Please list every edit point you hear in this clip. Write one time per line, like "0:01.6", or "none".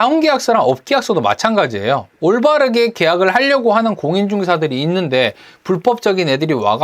0:02.1

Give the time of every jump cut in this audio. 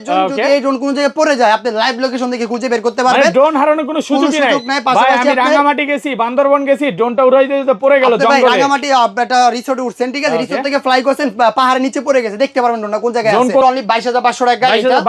0:13.6

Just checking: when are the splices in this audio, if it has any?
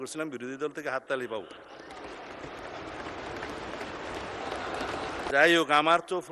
0:05.3

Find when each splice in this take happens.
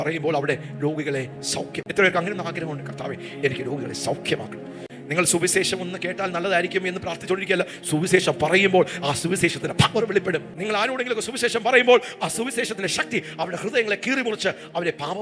0:01.8

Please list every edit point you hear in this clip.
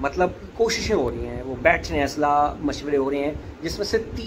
none

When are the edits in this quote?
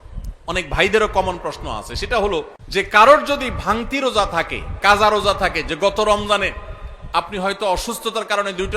0:02.6

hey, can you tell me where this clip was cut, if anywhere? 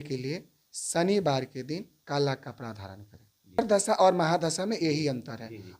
0:03.6

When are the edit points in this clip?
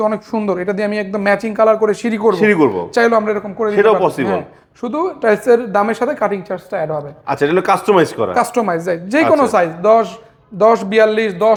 none

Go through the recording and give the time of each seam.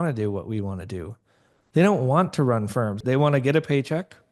0:03.0

